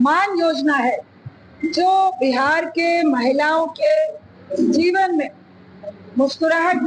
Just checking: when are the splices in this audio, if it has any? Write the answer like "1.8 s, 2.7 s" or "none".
none